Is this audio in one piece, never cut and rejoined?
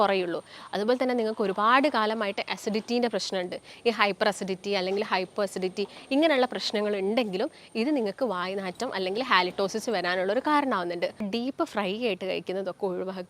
no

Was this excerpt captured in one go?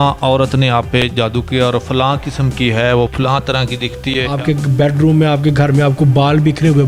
no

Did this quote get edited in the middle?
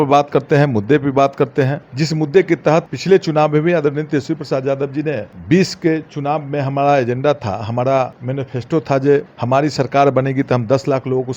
yes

